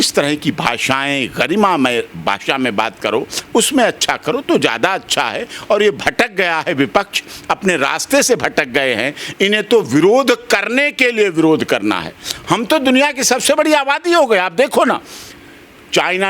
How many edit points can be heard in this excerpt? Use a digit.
0